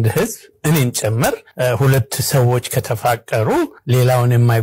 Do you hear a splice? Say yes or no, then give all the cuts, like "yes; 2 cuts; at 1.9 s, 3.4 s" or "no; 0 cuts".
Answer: yes; 2 cuts; at 1.5 s, 3.8 s